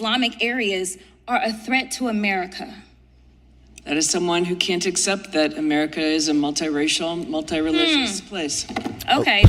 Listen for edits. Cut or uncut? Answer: uncut